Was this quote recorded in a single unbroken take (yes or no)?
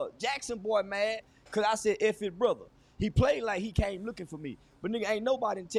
yes